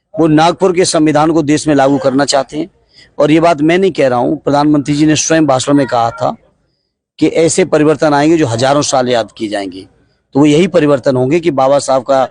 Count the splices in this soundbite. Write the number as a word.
zero